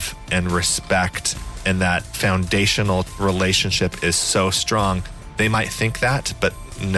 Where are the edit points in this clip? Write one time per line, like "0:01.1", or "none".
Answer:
0:01.9
0:03.1
0:05.2